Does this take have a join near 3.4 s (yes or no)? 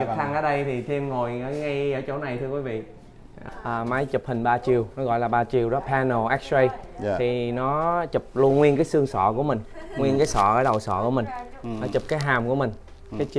yes